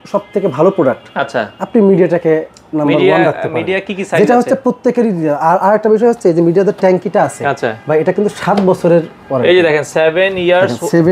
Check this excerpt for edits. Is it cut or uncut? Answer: uncut